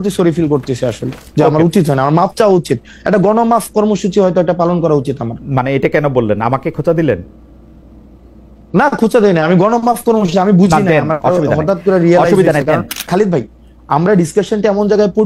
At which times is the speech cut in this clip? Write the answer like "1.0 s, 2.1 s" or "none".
13.0 s